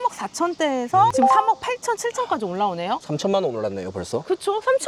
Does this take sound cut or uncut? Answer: uncut